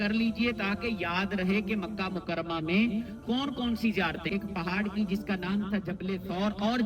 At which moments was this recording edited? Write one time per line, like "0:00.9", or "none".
0:04.3